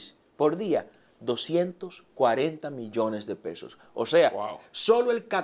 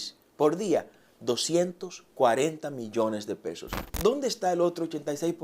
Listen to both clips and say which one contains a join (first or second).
second